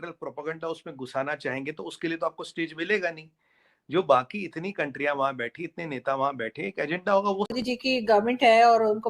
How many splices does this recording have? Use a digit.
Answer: 1